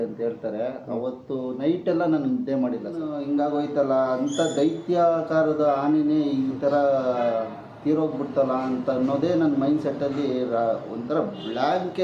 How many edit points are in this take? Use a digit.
1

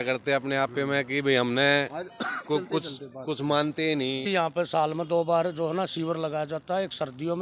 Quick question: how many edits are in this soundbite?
1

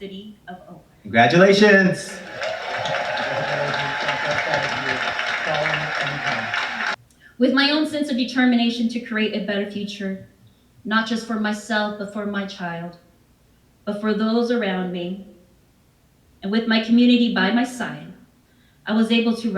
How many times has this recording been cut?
1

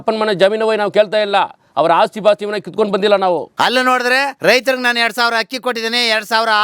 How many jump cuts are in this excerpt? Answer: 2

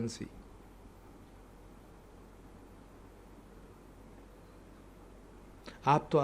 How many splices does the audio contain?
0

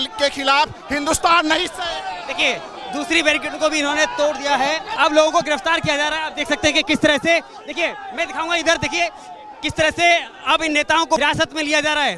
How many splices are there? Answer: 2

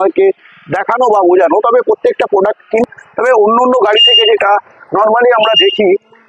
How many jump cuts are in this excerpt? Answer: 1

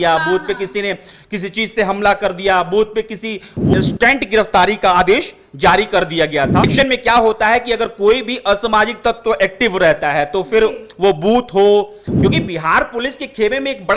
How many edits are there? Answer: 3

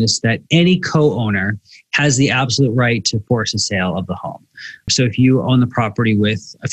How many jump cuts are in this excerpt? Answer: 1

